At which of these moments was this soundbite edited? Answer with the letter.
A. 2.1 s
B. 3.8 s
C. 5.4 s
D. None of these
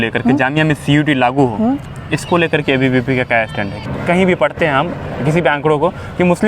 B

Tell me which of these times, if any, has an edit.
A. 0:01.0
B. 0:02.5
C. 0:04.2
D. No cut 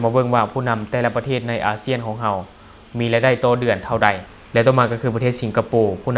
C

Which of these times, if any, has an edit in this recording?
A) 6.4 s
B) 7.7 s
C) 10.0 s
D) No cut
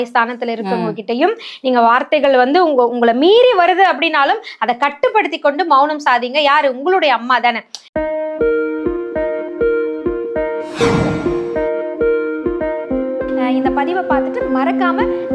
B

